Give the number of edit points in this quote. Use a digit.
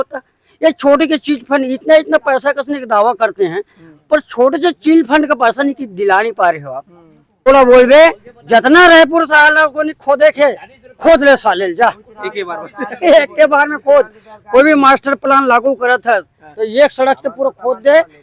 1